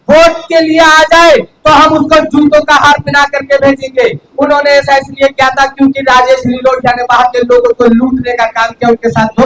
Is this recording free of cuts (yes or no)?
yes